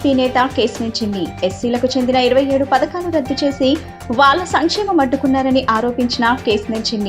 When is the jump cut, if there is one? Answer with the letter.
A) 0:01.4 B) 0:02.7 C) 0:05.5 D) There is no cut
D